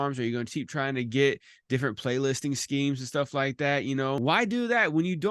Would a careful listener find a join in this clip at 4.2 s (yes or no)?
yes